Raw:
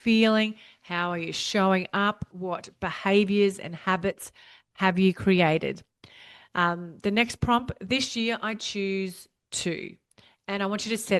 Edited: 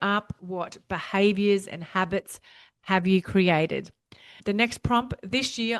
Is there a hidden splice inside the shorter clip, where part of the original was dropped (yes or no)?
yes